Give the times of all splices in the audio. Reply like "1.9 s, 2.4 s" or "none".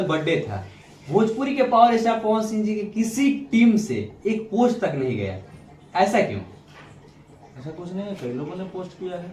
none